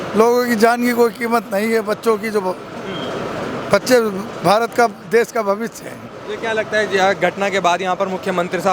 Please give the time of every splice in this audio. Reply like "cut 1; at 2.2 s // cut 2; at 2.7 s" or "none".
none